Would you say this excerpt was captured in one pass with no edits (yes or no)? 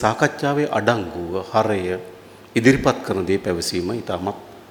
yes